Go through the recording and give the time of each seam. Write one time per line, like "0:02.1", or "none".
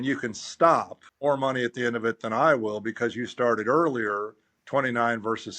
0:01.0